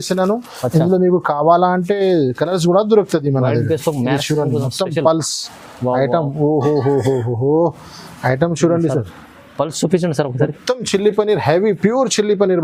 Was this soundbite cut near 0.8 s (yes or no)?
no